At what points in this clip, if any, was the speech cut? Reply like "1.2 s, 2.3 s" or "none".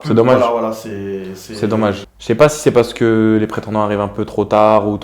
2.1 s